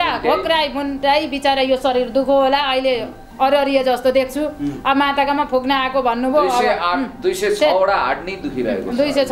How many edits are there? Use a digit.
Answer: 0